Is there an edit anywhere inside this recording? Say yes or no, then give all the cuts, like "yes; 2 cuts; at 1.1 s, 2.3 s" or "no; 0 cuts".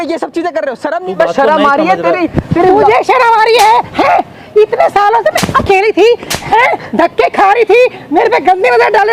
yes; 1 cut; at 1.1 s